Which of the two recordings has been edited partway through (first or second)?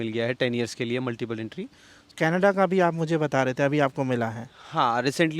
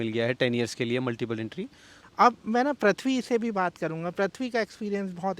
first